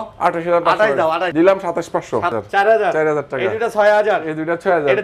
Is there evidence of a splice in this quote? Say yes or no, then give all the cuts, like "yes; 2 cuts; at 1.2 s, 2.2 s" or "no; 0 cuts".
yes; 2 cuts; at 1.3 s, 2.3 s